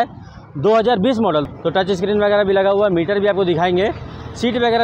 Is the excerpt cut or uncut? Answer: cut